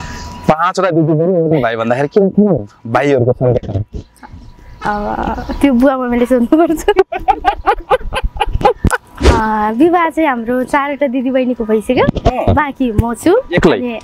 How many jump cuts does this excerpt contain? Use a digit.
1